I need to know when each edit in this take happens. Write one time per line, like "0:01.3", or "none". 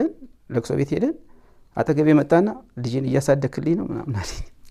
none